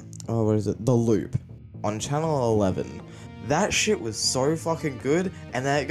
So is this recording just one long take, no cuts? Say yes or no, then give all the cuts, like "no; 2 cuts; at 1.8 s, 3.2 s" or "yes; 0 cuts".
yes; 0 cuts